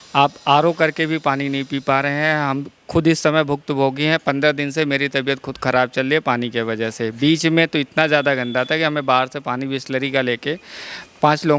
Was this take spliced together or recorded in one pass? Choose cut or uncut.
uncut